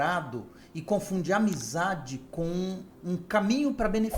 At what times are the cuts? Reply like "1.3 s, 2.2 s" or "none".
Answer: none